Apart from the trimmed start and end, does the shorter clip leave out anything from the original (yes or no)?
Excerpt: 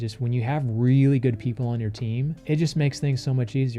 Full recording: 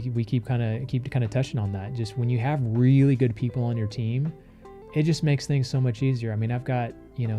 yes